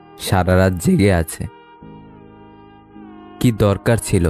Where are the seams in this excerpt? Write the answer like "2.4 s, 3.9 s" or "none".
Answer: 1.5 s, 3.0 s

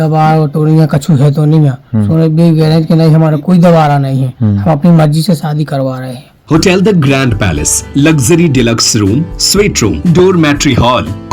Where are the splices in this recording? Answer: 6.3 s, 10.0 s

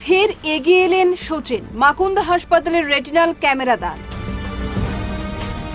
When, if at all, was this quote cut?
none

